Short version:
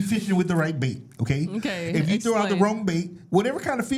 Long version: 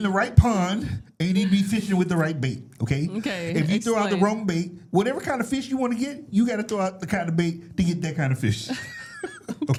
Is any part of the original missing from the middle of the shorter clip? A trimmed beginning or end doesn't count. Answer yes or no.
no